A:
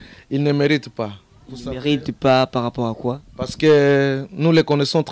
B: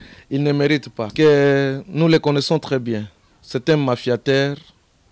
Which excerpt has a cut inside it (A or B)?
B